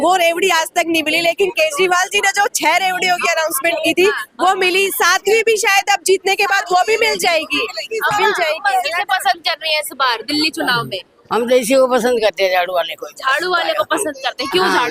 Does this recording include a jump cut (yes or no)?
no